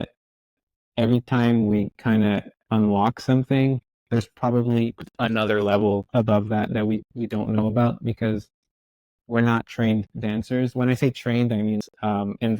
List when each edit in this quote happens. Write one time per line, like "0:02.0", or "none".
0:03.9
0:11.8